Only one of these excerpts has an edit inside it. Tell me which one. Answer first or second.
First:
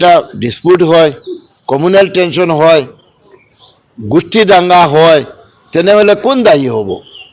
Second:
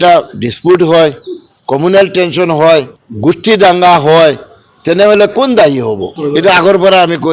second